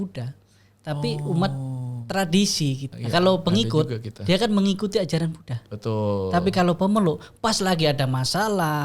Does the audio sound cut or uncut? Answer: cut